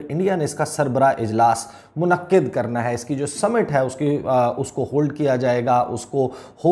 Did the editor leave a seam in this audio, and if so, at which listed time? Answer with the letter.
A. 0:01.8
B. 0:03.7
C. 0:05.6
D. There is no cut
D